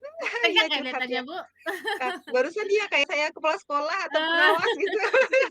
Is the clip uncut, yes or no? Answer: no